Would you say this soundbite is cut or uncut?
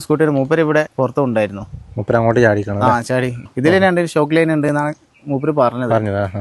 cut